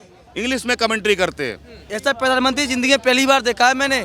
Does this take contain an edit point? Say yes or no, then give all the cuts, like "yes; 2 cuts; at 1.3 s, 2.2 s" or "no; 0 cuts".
yes; 1 cut; at 1.8 s